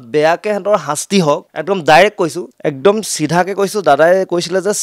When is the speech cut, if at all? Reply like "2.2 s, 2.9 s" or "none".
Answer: 1.5 s, 2.5 s